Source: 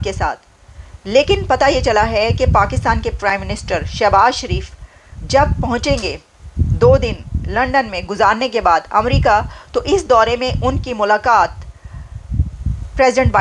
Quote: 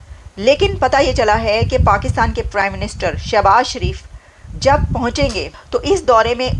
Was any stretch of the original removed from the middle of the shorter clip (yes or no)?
yes